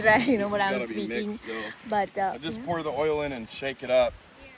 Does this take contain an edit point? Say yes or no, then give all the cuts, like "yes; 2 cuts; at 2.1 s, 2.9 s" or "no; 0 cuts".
no; 0 cuts